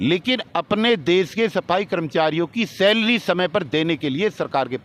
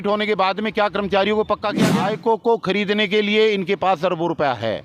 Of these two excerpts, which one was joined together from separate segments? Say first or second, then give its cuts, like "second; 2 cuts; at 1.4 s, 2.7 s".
second; 1 cut; at 1.9 s